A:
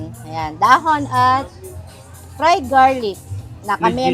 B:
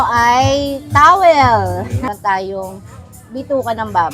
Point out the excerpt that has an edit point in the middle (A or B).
B